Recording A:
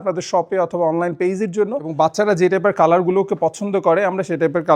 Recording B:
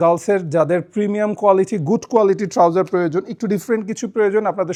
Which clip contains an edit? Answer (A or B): A